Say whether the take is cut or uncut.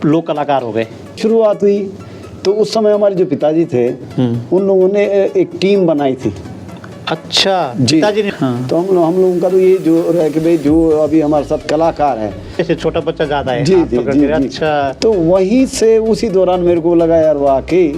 cut